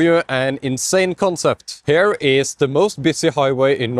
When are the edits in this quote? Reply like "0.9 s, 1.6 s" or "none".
1.7 s